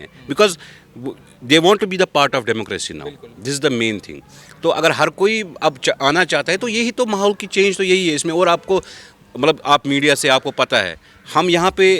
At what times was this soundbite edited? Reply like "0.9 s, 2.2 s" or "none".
none